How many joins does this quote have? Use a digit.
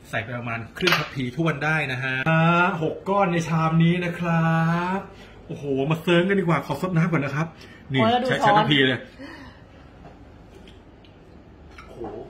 1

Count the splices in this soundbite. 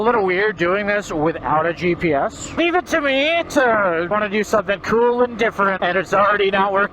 3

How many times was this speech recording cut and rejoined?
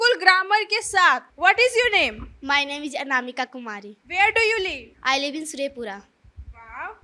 0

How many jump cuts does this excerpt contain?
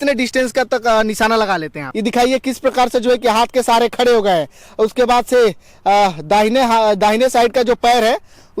1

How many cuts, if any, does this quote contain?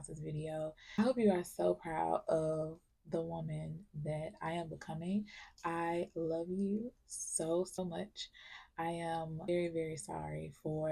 1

